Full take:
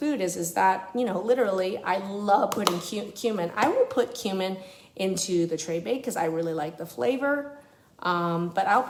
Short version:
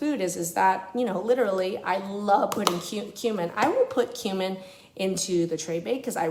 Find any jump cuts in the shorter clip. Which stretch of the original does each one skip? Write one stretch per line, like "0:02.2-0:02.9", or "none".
none